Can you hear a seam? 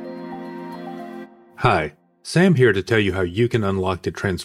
yes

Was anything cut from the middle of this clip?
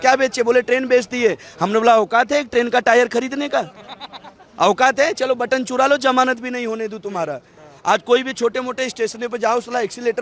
no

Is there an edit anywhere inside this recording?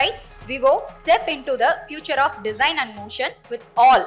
no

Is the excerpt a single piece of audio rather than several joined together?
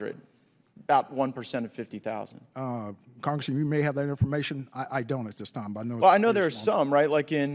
yes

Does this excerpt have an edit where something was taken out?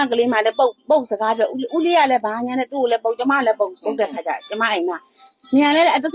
no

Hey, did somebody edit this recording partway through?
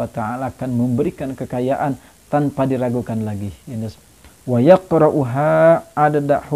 yes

